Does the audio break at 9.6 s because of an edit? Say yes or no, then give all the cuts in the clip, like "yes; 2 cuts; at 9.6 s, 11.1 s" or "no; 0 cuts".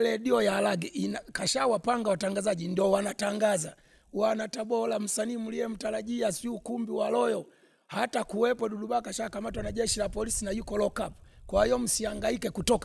no; 0 cuts